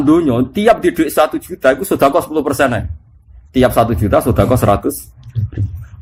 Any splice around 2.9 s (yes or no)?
no